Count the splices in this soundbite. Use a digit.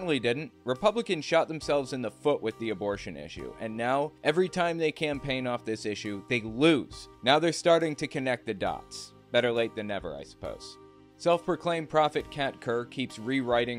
1